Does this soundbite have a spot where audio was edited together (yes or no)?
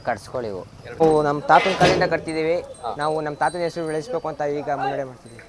yes